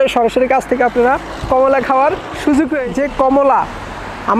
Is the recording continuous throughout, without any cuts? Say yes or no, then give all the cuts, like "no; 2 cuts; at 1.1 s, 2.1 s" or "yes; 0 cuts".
no; 1 cut; at 2.8 s